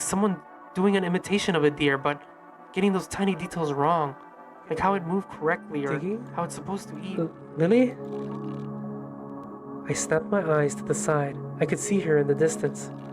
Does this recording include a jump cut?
yes; 1 cut; at 6.8 s

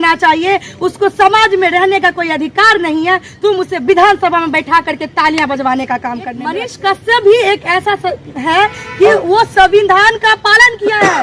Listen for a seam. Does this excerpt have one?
yes; 1 cut; at 6.7 s

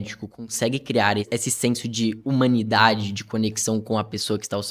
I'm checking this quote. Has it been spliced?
yes; 1 cut; at 1.3 s

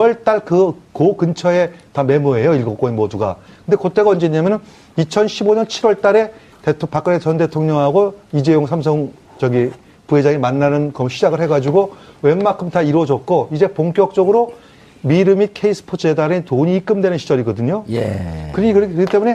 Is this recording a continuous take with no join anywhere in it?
no; 1 cut; at 8.2 s

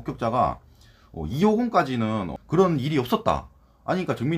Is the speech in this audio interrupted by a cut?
yes; 1 cut; at 2.3 s

